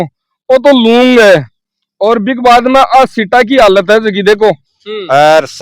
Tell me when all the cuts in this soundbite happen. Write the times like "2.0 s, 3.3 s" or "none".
4.5 s